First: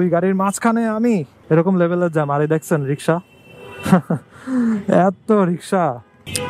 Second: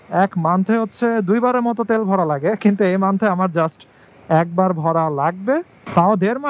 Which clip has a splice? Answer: first; 1 cut; at 1.3 s

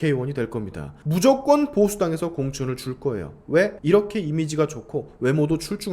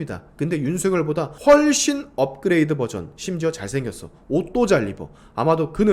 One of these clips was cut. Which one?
first; 1 cut; at 1.0 s

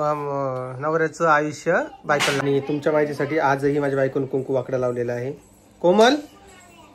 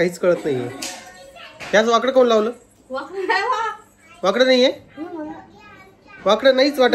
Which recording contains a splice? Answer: first; 1 cut; at 2.4 s

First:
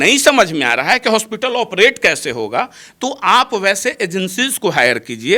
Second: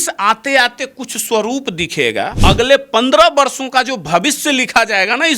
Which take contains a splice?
second; 1 cut; at 2.3 s

